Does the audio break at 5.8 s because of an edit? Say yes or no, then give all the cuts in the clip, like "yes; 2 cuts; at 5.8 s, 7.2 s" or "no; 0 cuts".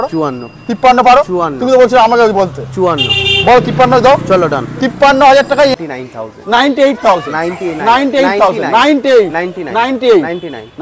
yes; 1 cut; at 5.8 s